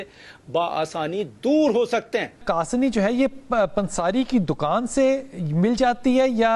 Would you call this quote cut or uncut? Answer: cut